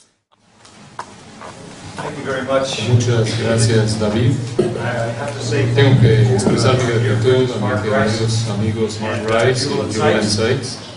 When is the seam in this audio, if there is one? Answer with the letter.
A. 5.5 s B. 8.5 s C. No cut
B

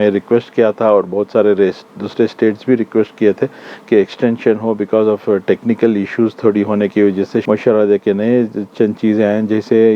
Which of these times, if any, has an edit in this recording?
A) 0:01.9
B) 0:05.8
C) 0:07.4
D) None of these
C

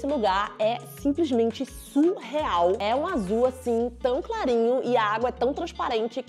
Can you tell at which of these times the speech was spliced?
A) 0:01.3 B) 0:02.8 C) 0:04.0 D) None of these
D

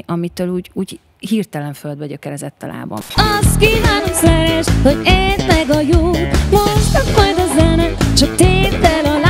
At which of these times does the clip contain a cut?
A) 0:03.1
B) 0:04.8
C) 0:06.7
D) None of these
A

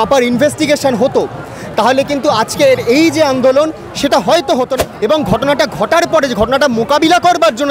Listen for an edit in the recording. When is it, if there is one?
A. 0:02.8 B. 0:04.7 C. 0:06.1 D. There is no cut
B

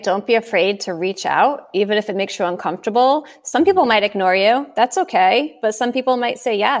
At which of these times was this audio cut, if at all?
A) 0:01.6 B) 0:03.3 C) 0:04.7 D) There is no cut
D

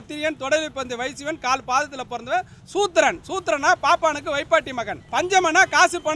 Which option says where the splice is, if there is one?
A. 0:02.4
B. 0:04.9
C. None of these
B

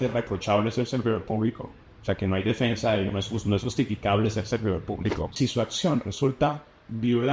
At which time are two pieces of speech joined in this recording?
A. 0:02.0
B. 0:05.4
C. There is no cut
B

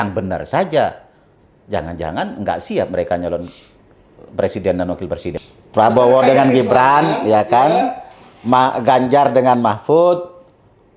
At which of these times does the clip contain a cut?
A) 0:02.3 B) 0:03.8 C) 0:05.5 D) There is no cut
C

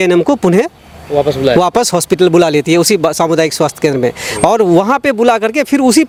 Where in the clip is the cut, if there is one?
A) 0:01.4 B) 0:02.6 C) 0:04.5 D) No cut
D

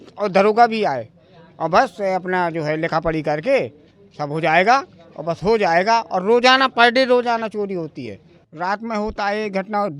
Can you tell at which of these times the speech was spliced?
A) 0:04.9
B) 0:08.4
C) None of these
B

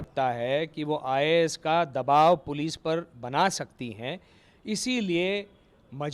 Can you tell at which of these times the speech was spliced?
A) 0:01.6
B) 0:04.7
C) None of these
C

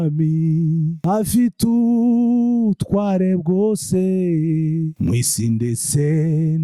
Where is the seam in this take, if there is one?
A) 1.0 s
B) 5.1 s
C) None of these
A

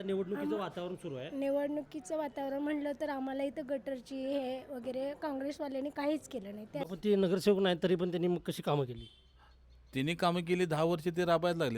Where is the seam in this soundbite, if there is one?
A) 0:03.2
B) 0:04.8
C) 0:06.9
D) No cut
C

